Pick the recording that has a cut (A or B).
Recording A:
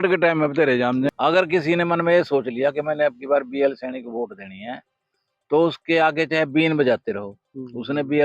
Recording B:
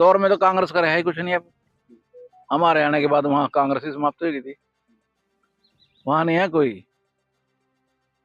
A